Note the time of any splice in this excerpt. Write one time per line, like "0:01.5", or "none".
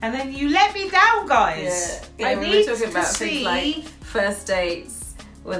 none